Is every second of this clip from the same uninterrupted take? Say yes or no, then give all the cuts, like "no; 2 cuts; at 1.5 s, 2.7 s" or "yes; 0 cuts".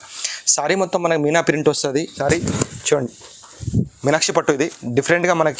no; 1 cut; at 2.1 s